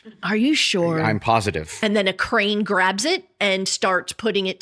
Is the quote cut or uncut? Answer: cut